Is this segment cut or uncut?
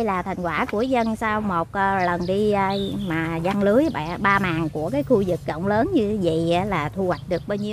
uncut